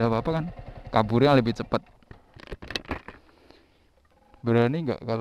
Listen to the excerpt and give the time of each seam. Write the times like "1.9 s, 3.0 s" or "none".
none